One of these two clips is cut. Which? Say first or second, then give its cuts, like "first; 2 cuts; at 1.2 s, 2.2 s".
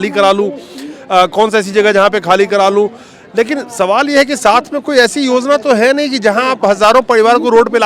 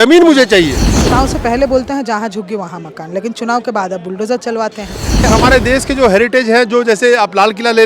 second; 2 cuts; at 1.0 s, 5.3 s